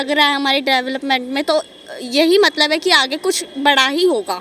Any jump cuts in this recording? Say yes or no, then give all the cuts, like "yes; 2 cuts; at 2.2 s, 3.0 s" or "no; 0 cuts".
no; 0 cuts